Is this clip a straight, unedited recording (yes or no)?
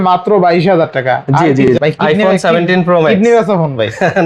no